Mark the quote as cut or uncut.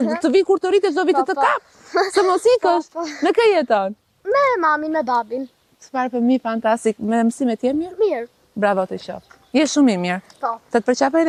uncut